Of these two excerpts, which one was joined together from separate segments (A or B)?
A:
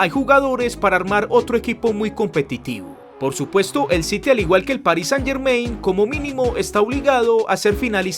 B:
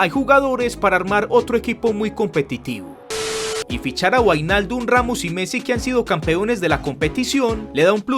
B